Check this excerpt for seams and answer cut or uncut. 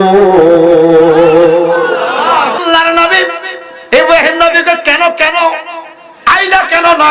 cut